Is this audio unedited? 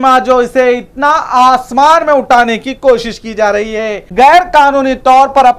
no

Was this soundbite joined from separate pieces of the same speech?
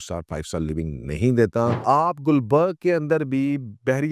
yes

